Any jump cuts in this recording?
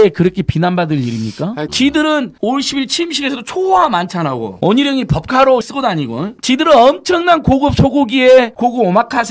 yes; 3 cuts; at 1.7 s, 2.4 s, 5.7 s

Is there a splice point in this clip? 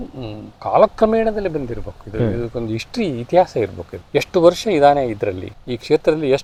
no; 0 cuts

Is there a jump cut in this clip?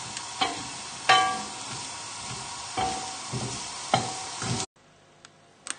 no; 0 cuts

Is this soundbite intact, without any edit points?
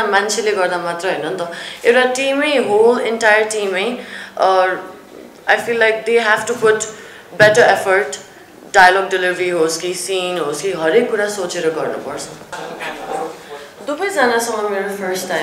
no; 1 cut; at 12.5 s

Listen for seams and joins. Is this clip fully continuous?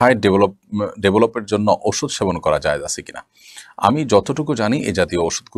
yes; 0 cuts

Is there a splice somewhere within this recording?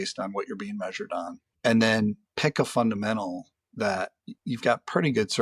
yes; 3 cuts; at 1.4 s, 2.3 s, 4.3 s

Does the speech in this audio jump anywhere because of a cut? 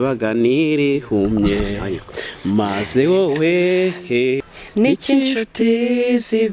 yes; 1 cut; at 4.4 s

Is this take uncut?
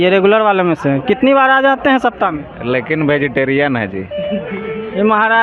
yes; 0 cuts

